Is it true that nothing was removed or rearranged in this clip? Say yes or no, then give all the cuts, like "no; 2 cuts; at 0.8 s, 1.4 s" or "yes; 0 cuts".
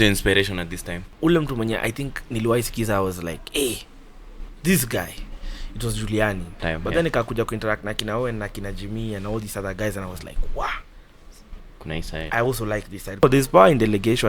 no; 3 cuts; at 1.1 s, 6.6 s, 13.2 s